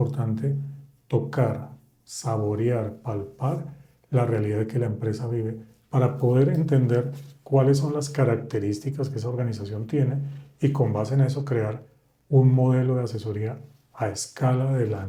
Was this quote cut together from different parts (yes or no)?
no